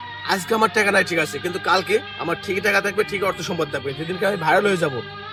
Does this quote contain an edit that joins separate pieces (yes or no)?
no